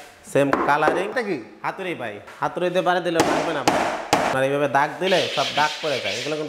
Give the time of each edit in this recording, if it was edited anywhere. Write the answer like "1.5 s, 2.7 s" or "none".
1.1 s, 2.3 s, 4.3 s

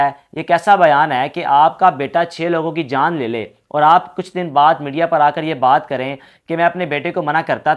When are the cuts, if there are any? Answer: none

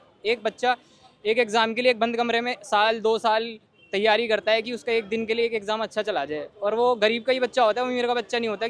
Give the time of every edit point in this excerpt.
none

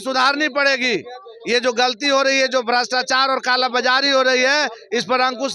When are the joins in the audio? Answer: none

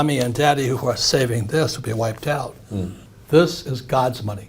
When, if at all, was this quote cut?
3.0 s

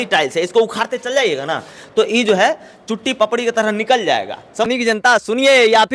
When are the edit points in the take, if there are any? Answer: 4.7 s

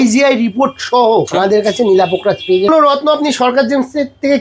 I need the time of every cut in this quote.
1.3 s, 2.7 s

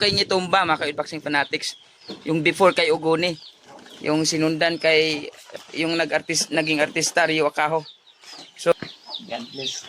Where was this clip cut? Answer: 8.7 s

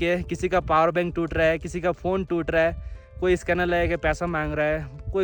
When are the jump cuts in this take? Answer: none

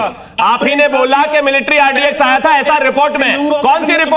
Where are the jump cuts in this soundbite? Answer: none

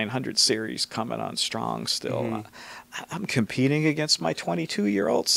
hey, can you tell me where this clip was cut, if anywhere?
none

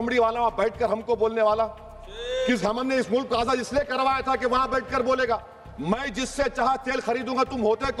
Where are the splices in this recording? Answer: none

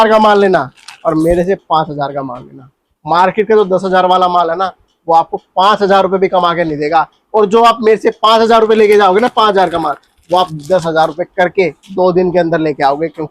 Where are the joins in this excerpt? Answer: none

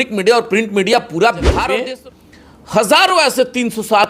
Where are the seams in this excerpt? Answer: 1.8 s

